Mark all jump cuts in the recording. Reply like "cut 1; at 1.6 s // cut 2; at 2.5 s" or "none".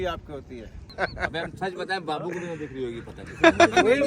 cut 1; at 0.9 s